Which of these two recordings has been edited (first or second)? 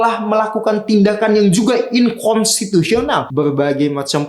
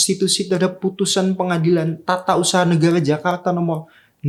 first